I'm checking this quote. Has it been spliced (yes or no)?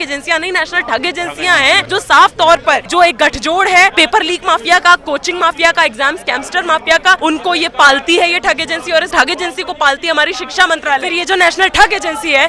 yes